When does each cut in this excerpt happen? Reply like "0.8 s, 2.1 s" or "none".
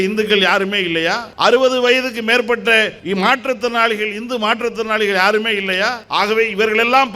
1.3 s, 3.0 s, 6.0 s